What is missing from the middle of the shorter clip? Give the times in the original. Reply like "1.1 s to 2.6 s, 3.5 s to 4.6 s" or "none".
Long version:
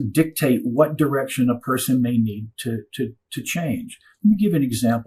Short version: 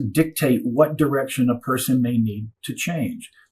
2.5 s to 3.2 s